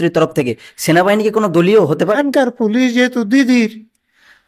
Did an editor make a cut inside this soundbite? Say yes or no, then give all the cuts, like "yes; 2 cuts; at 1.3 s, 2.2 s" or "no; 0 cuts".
yes; 1 cut; at 2.2 s